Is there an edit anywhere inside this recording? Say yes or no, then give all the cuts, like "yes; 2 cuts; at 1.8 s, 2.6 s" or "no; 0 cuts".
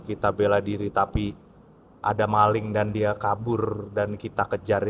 no; 0 cuts